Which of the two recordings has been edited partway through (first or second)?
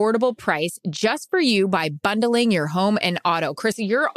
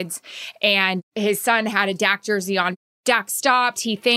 second